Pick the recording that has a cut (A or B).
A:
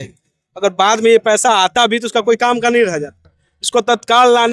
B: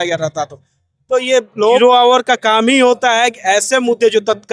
B